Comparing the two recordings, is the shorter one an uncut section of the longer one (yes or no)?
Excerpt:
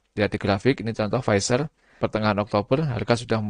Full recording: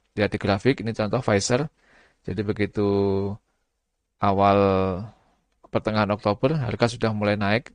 no